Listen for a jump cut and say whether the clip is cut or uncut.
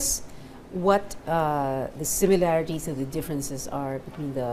cut